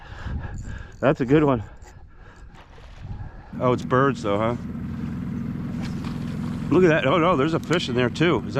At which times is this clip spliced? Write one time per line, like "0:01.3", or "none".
0:03.5